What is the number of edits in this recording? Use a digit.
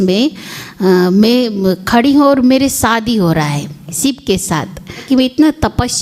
2